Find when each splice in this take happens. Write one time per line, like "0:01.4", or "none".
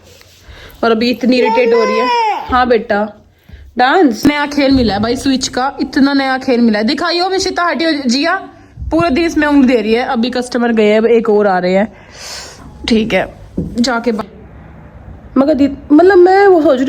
0:04.2
0:14.3